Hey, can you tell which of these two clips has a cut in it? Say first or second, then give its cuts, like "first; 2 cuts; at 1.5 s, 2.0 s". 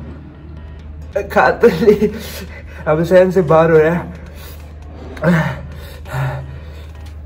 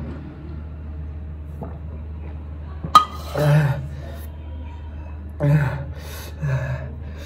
first; 1 cut; at 1.0 s